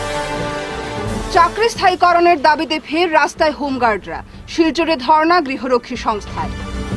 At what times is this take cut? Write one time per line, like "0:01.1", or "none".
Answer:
0:01.1